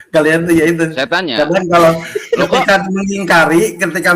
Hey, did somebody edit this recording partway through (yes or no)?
no